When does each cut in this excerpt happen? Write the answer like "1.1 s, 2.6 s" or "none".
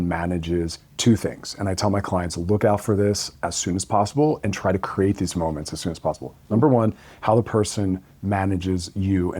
none